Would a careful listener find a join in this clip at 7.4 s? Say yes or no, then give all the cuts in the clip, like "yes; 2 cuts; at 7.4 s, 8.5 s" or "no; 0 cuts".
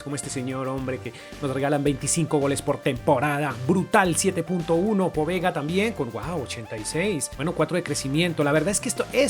no; 0 cuts